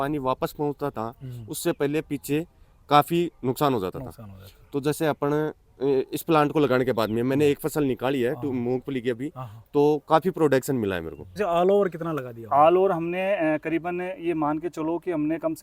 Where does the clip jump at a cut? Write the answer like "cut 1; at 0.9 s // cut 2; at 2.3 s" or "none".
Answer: cut 1; at 11.4 s